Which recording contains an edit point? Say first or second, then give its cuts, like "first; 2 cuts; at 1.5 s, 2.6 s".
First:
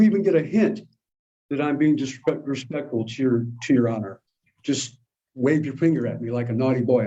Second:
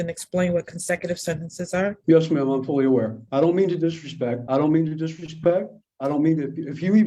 second; 3 cuts; at 2.0 s, 3.2 s, 4.4 s